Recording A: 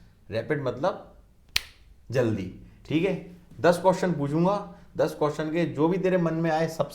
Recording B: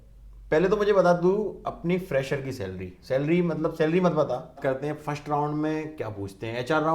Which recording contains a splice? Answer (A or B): B